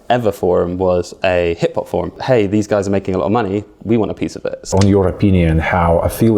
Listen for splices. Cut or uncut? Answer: cut